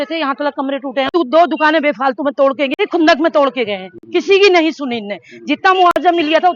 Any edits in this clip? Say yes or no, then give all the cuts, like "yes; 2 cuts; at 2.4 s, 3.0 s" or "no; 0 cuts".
yes; 2 cuts; at 1.1 s, 2.8 s